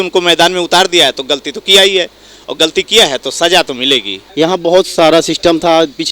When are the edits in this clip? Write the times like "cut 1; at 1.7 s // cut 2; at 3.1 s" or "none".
cut 1; at 4.2 s